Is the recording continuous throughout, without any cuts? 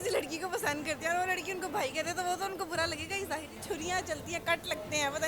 no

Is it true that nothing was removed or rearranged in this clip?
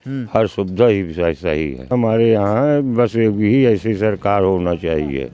no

